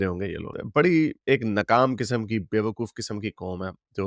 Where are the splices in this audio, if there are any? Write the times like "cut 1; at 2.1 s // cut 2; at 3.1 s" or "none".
none

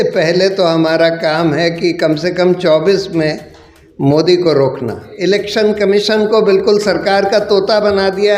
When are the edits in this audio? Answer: cut 1; at 5.1 s

